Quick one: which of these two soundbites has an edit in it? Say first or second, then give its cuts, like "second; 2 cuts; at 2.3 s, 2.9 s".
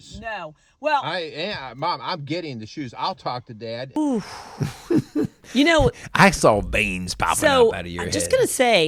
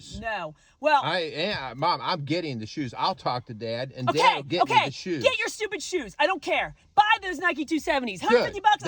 second; 1 cut; at 3.9 s